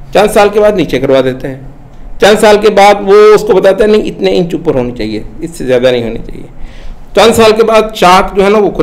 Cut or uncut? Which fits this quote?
uncut